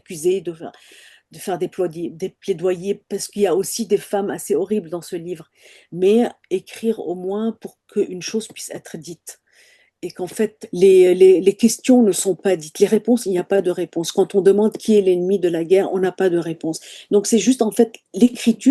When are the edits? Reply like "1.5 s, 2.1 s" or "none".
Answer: 10.6 s

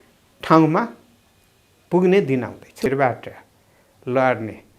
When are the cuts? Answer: 2.9 s

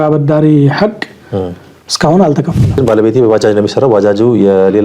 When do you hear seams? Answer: 2.7 s

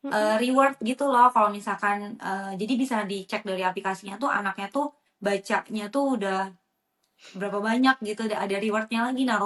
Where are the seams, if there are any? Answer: none

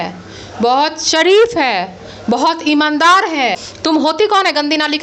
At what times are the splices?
3.7 s

